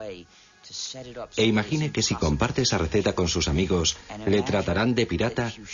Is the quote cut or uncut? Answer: cut